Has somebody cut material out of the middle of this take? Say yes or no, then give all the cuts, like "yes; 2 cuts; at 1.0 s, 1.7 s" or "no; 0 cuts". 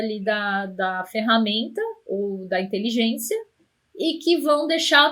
no; 0 cuts